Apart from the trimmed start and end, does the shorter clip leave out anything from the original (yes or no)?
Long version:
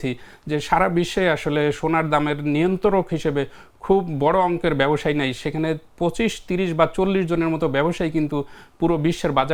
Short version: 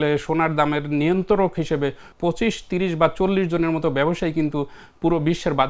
yes